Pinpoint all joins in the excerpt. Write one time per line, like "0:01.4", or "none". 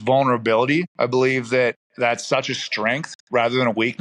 0:00.9